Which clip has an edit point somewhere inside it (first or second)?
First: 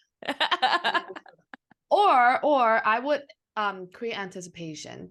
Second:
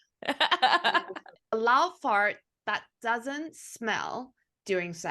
second